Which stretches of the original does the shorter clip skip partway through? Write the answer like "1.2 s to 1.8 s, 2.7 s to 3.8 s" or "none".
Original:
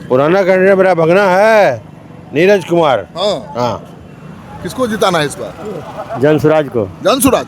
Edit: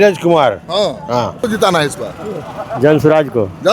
3.9 s to 4.8 s